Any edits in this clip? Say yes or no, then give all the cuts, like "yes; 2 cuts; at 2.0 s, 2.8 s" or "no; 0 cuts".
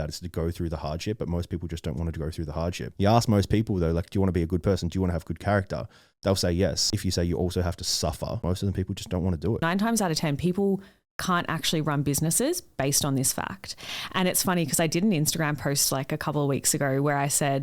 yes; 4 cuts; at 2.9 s, 6.9 s, 8.4 s, 9.6 s